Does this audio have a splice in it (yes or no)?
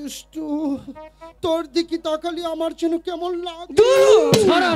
no